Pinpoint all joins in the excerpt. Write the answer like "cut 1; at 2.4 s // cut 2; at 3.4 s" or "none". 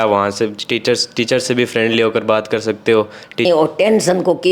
cut 1; at 3.5 s